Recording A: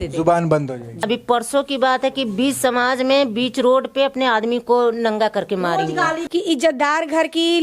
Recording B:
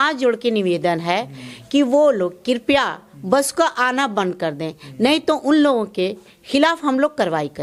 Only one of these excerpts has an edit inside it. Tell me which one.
A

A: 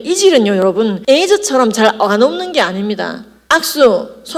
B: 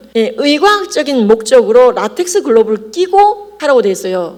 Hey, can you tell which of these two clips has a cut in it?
A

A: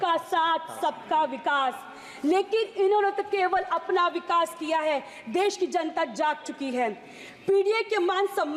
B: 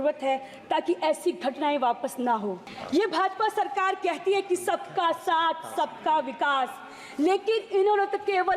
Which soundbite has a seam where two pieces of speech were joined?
B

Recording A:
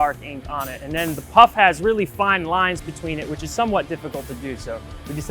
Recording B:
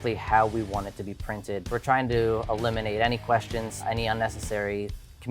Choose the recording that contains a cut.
B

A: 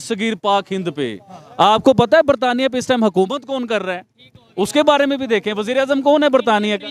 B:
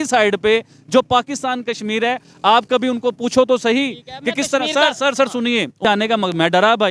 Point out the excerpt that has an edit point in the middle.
B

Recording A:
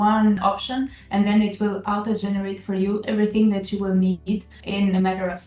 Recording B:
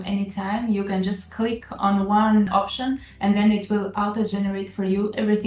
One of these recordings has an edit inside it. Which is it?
A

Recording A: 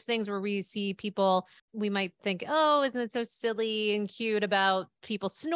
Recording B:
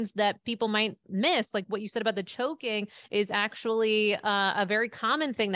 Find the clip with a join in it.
A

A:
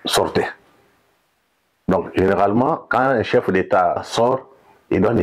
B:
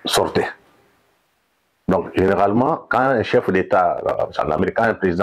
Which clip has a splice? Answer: A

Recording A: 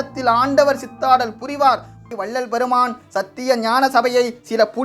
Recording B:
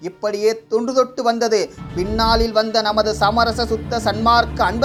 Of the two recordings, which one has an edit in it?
A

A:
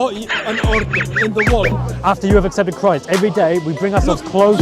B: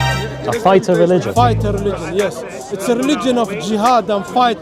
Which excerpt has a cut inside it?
A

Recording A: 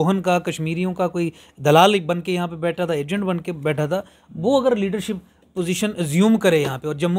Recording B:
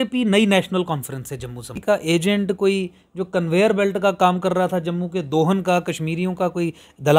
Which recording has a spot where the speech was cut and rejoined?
B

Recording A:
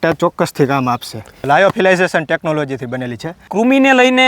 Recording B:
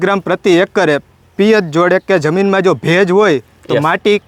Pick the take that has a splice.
A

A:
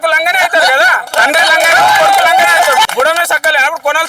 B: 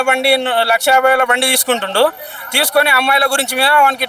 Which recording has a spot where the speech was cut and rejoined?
A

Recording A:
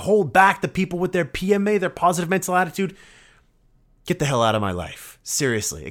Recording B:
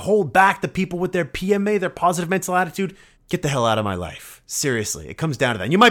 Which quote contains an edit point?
B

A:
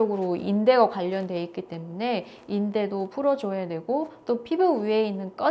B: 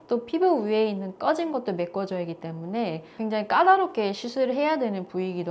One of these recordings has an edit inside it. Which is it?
B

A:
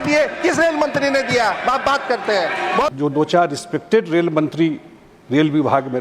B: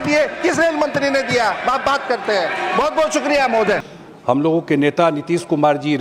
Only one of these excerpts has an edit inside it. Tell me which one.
A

